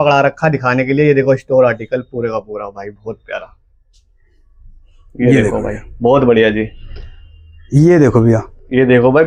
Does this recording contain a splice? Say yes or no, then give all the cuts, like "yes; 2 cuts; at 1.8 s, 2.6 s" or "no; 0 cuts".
no; 0 cuts